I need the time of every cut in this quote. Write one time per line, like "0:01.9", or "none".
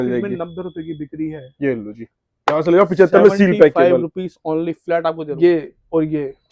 0:05.2